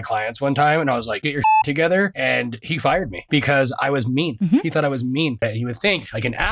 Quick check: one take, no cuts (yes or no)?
no